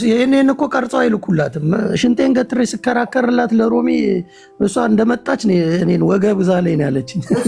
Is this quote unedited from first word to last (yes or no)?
yes